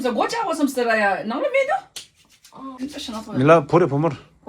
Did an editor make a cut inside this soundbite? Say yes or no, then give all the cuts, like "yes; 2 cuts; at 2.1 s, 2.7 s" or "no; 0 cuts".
yes; 1 cut; at 2.8 s